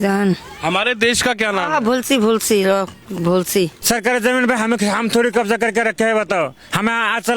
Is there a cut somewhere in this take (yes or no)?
yes